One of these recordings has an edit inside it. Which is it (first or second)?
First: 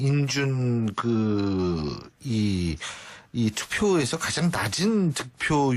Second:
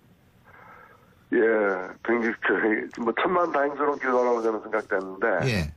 first